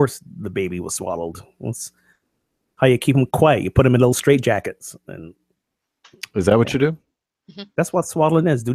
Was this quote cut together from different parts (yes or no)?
no